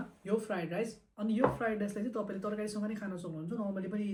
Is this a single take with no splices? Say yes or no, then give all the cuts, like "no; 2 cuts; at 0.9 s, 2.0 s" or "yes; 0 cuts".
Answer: yes; 0 cuts